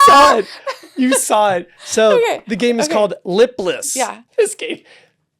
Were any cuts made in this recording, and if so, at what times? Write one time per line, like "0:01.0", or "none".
0:04.2